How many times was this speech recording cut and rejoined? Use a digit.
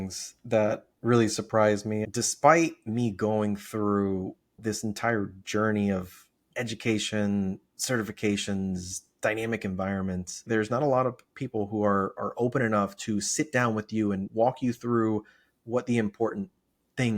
2